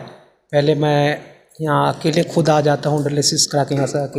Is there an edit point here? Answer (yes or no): no